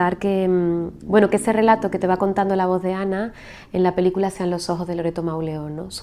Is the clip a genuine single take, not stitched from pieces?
yes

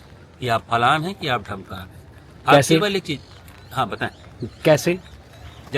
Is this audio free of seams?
yes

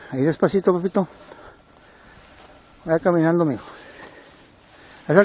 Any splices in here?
yes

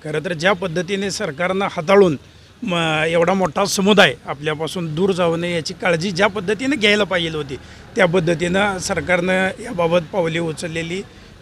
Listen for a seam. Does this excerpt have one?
no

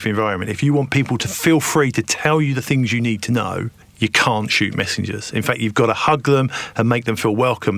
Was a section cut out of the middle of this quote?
yes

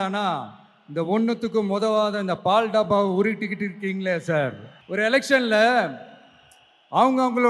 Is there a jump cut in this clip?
yes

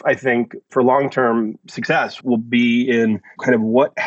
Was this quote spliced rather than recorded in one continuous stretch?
no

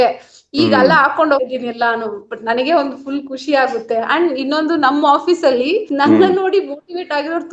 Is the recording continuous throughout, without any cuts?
yes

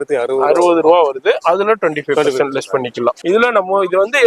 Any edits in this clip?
yes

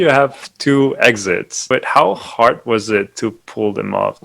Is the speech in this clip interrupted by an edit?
yes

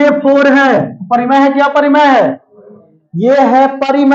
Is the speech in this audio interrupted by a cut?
no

